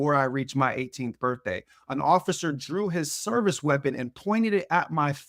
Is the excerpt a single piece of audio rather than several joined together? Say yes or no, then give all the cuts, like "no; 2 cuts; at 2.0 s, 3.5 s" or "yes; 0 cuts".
yes; 0 cuts